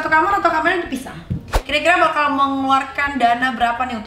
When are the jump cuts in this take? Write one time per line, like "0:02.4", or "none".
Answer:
0:01.5